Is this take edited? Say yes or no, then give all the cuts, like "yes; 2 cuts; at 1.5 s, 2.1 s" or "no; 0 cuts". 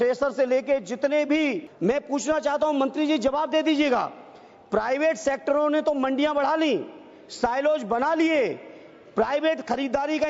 yes; 1 cut; at 1.7 s